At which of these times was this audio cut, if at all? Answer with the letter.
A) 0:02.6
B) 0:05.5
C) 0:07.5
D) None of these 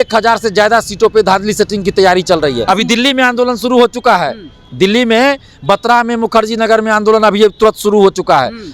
A